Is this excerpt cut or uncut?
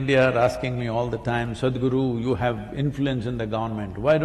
uncut